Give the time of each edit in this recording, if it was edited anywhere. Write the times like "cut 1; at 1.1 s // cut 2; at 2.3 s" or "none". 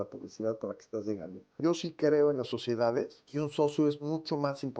cut 1; at 1.6 s // cut 2; at 3.2 s